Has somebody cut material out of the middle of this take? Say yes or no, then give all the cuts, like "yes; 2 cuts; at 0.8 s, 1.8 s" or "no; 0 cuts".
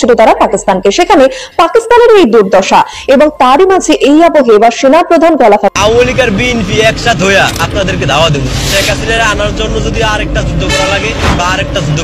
yes; 1 cut; at 5.7 s